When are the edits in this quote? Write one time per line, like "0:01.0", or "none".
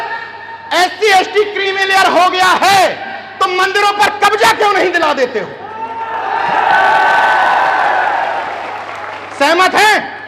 none